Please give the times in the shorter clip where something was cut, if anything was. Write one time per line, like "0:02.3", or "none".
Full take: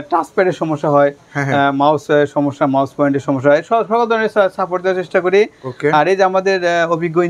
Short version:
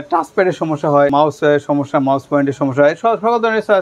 0:01.1

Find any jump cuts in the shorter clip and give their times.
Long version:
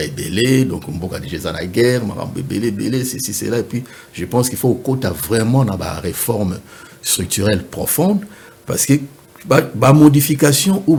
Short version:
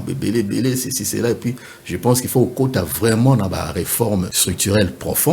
0:04.4

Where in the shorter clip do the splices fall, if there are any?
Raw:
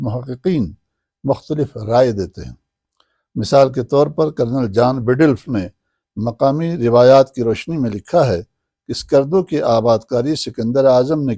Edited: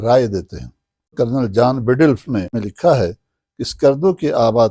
0:01.1
0:02.7

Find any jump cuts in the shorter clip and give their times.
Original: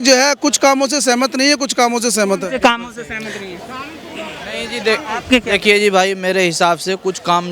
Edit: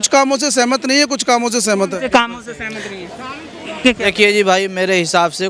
0:03.8

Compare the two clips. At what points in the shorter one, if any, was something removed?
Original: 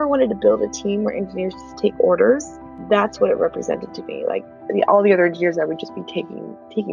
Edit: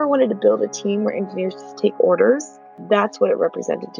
none

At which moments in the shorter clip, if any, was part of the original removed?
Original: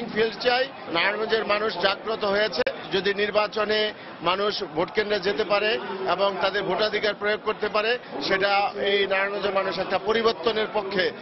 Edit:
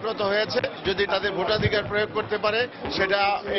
0:01.0

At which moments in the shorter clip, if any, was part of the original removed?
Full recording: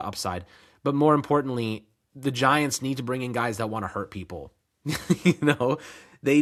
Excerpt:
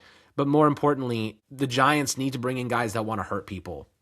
0:01.4

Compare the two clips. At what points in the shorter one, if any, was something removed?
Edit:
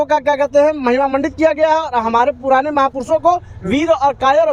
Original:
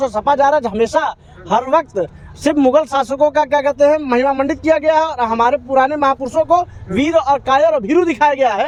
none

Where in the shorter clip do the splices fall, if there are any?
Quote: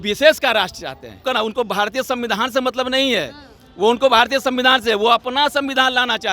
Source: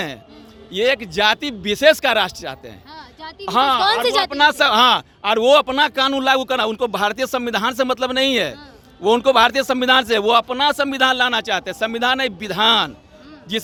0:01.2

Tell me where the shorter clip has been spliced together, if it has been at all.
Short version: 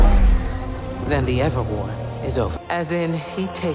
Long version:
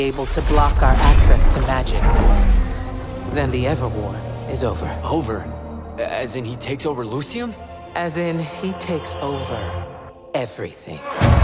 0:02.6

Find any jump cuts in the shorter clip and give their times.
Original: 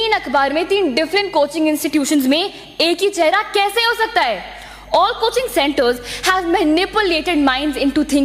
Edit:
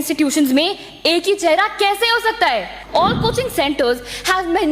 0:02.8

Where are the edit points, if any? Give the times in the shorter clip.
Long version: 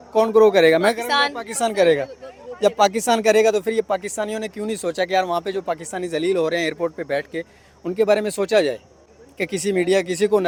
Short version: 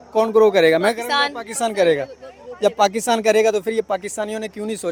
none

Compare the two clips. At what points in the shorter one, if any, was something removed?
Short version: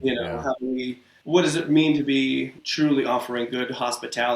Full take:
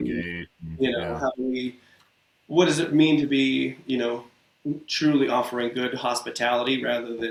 0:01.1
0:02.6

